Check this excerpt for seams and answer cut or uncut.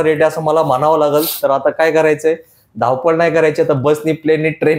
uncut